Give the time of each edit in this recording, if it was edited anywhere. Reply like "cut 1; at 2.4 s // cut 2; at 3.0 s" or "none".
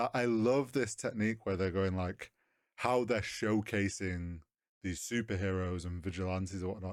none